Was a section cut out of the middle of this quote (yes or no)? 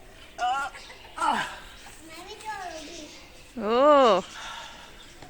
no